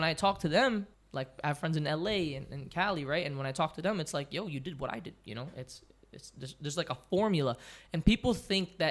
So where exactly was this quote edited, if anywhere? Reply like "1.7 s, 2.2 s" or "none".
1.0 s